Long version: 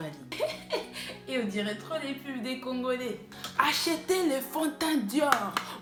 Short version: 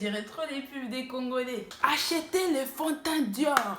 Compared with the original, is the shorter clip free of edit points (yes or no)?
no